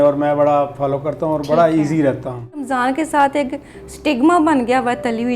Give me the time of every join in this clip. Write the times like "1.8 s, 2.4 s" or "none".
2.7 s

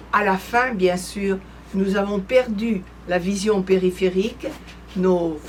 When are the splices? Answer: none

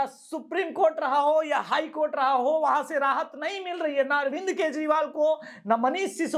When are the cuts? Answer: none

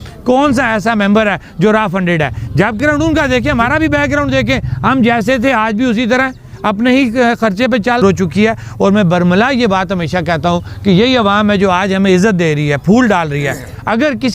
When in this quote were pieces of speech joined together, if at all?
2.8 s, 8.0 s

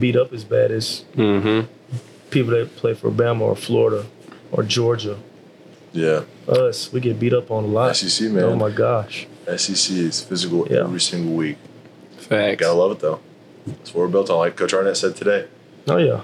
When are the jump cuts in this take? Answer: none

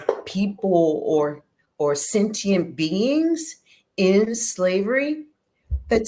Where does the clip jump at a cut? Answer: none

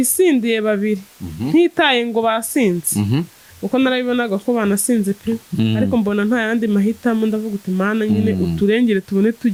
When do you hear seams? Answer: none

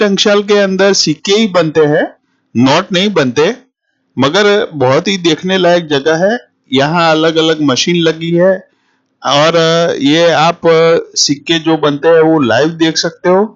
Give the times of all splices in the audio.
none

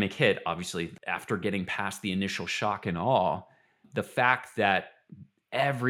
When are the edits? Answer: 1.0 s

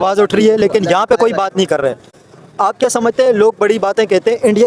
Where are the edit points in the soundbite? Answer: none

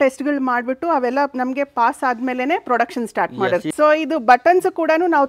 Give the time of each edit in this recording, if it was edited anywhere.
3.7 s

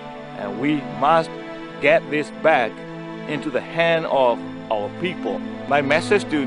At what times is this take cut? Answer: 5.5 s

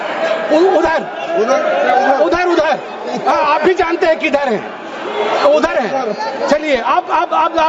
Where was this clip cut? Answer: none

